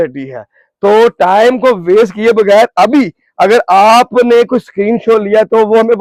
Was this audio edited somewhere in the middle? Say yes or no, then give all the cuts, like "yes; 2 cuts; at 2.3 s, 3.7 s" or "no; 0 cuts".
no; 0 cuts